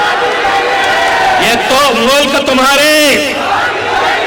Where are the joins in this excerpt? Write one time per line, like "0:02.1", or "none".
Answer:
none